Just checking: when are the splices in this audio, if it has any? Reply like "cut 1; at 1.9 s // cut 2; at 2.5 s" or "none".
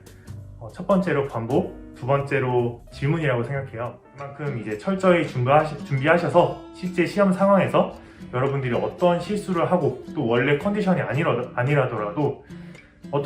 cut 1; at 4.4 s

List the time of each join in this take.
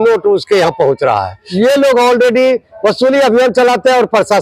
cut 1; at 1.4 s

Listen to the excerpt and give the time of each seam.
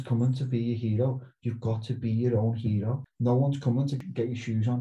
cut 1; at 3.0 s // cut 2; at 4.0 s

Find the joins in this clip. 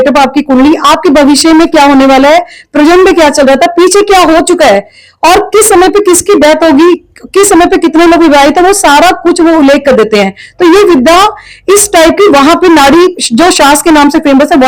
none

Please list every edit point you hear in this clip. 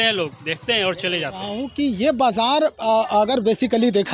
cut 1; at 1.6 s

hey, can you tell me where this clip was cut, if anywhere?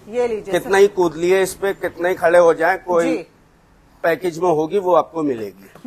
cut 1; at 4.0 s

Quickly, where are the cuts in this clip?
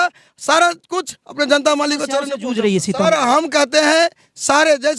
cut 1; at 2.3 s

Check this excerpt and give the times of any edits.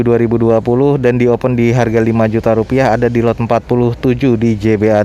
none

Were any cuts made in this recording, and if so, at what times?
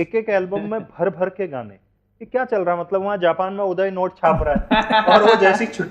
none

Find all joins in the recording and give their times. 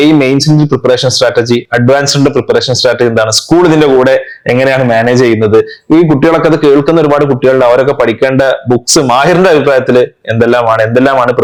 none

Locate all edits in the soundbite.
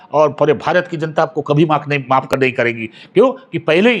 none

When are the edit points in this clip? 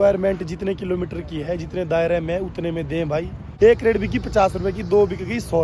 cut 1; at 3.5 s

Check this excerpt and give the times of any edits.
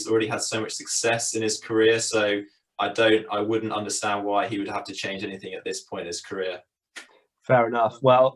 none

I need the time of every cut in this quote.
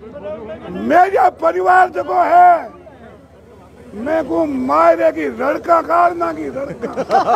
none

